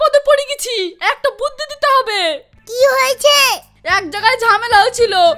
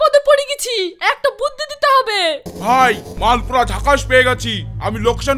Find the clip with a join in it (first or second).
second